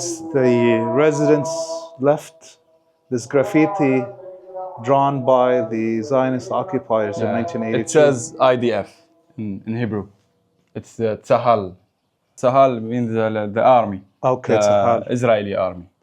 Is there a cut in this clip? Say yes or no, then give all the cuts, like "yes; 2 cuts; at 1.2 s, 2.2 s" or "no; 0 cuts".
yes; 1 cut; at 12.3 s